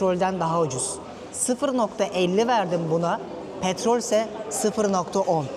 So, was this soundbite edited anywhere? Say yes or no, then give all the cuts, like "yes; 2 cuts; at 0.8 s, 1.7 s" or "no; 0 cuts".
no; 0 cuts